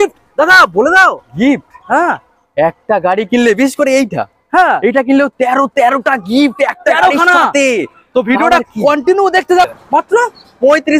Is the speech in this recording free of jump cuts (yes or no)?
no